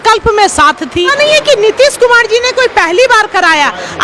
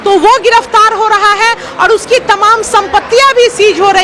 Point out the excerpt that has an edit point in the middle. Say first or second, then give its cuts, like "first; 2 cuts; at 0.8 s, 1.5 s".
first; 1 cut; at 1.1 s